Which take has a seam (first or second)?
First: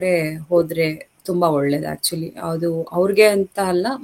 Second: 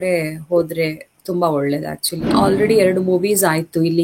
second